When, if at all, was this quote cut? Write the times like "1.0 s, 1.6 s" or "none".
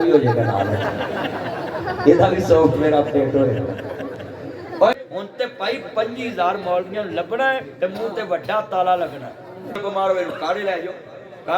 5.0 s, 9.8 s